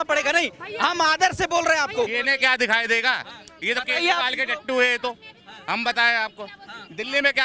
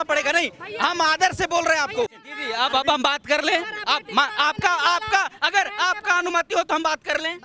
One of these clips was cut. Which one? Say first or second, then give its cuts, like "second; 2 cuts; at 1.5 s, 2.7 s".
second; 1 cut; at 2.2 s